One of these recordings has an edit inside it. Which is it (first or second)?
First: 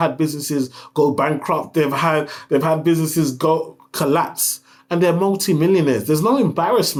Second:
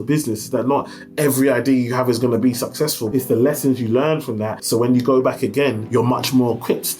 second